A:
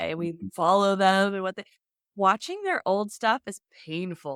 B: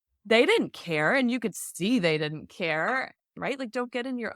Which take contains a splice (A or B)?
B